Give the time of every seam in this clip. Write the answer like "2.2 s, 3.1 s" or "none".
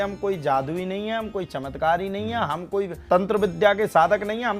3.0 s